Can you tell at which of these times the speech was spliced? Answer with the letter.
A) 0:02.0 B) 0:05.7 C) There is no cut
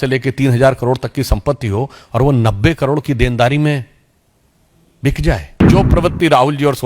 B